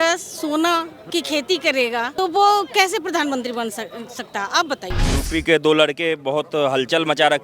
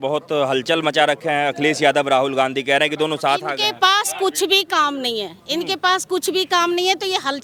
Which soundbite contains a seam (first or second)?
first